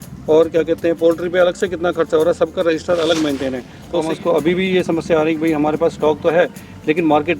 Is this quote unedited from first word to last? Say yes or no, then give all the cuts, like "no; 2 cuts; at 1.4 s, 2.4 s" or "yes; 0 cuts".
no; 1 cut; at 4.0 s